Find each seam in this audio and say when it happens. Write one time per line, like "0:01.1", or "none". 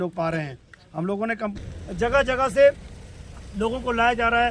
0:01.6